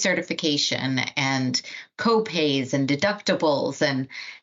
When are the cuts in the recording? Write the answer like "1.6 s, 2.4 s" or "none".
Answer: none

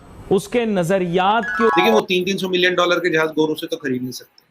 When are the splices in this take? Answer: 1.7 s

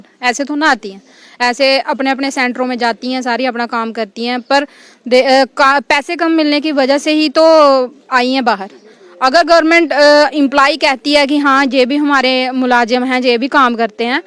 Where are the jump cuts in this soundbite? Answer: none

